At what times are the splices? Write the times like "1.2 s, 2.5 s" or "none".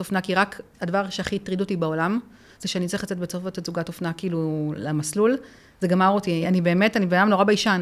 6.4 s